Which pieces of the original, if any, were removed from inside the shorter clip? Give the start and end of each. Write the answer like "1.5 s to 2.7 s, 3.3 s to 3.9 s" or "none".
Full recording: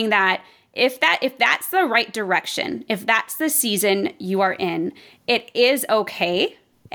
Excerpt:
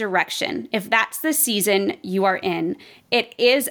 none